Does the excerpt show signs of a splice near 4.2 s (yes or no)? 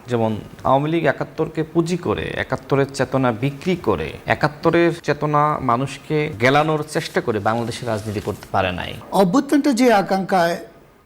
yes